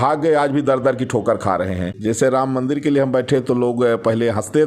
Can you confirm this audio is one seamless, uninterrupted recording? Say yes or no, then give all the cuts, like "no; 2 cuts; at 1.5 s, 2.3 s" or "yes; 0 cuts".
no; 1 cut; at 1.9 s